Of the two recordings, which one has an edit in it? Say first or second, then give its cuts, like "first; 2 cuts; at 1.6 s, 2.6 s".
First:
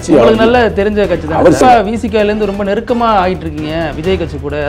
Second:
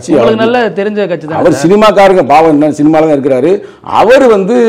first; 1 cut; at 1.6 s